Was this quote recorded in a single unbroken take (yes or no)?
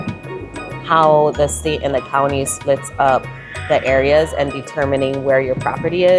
yes